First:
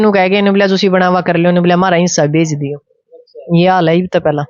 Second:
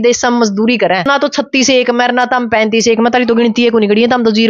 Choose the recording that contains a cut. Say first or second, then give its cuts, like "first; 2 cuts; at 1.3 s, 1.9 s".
second; 1 cut; at 1.1 s